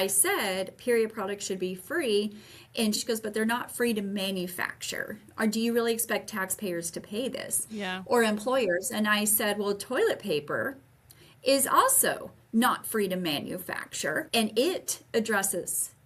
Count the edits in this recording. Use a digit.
2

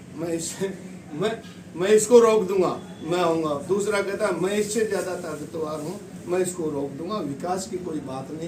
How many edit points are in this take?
0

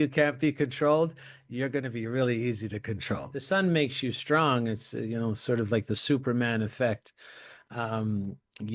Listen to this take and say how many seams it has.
1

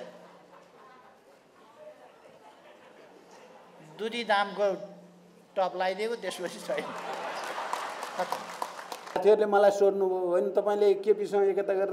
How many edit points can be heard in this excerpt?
1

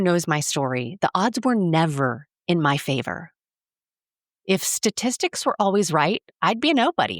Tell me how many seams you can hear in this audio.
0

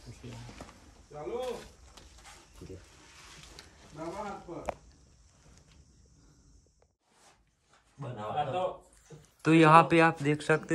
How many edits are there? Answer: 0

